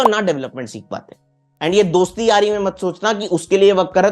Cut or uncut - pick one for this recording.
cut